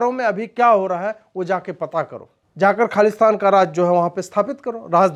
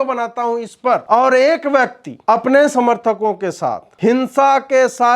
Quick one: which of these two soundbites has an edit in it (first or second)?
second